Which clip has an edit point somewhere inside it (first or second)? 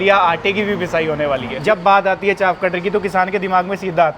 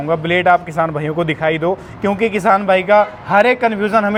first